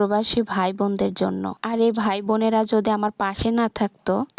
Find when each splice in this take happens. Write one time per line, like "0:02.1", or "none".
none